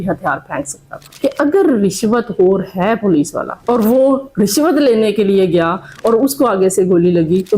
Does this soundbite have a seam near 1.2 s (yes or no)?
yes